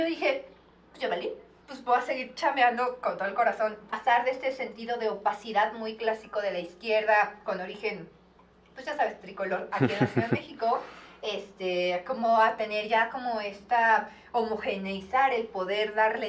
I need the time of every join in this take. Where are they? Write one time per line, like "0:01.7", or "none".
0:04.0